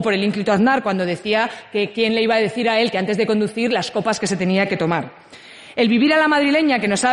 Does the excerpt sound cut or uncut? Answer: cut